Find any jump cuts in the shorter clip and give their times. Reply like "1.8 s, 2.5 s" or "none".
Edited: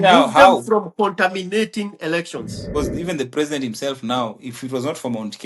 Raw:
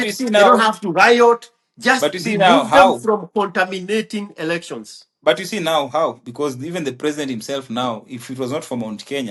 2.6 s